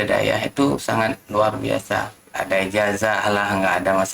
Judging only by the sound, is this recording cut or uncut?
cut